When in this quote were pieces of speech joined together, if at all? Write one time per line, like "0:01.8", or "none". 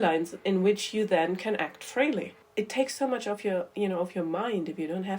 0:02.4